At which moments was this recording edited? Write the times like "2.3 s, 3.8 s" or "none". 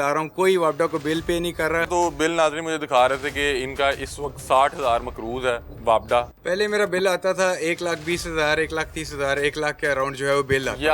1.9 s, 6.4 s